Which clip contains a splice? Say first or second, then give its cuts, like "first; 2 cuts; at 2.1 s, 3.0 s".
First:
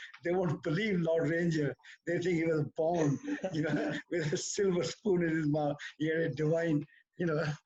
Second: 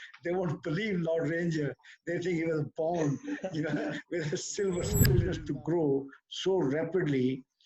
second; 1 cut; at 5.1 s